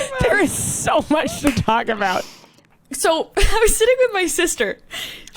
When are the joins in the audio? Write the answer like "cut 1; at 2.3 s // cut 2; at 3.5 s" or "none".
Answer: cut 1; at 2.6 s